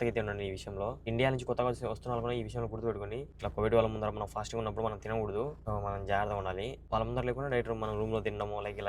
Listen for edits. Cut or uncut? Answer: cut